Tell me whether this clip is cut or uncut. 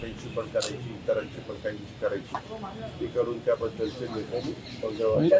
uncut